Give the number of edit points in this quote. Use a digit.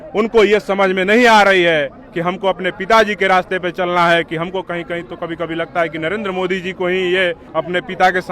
1